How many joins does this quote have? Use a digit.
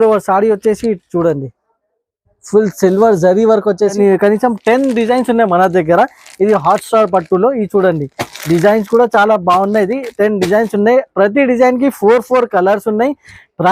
1